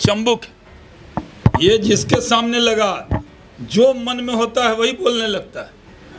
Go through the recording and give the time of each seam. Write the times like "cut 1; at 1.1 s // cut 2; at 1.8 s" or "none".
none